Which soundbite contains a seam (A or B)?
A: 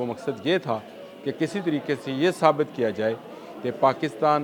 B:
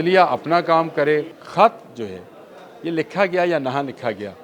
B